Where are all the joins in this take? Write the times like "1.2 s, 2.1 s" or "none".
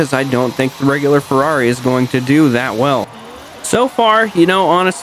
3.1 s